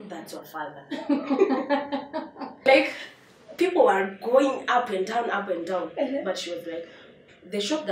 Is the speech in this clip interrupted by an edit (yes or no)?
yes